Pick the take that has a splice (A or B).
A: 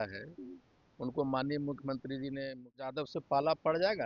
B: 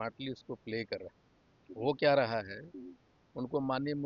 A